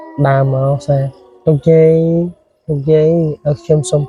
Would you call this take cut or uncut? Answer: uncut